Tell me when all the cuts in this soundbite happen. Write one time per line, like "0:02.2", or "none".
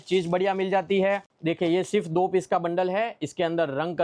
0:01.3